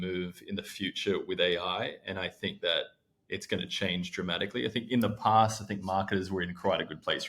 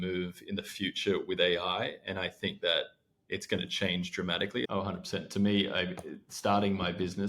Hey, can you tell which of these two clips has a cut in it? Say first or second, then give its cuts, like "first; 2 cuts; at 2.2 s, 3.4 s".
second; 1 cut; at 4.7 s